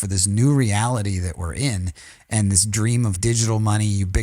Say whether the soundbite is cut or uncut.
cut